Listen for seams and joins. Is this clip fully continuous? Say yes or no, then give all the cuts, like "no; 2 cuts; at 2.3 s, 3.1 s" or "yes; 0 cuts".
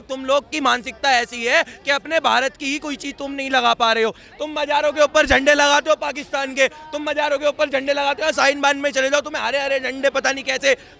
yes; 0 cuts